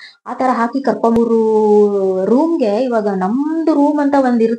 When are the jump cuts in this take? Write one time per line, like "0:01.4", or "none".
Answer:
0:01.2